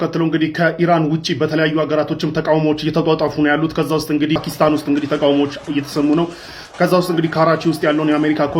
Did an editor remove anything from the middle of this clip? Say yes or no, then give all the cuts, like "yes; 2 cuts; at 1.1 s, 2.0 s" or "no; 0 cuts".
yes; 1 cut; at 4.4 s